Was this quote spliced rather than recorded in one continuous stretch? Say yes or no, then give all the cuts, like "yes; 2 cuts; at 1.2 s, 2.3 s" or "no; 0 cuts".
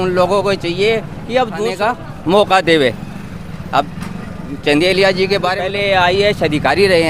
yes; 2 cuts; at 1.7 s, 5.6 s